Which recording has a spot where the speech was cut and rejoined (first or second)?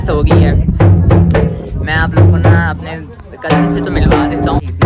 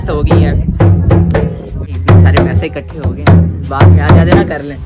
second